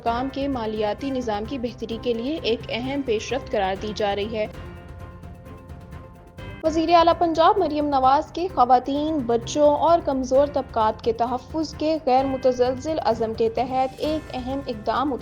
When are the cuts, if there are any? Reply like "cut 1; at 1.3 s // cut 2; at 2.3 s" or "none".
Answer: cut 1; at 4.5 s // cut 2; at 6.6 s